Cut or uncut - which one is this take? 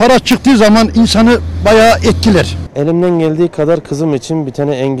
cut